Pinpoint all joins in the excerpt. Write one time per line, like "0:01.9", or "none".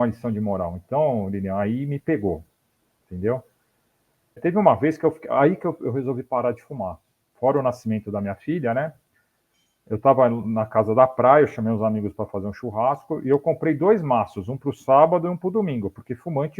0:04.4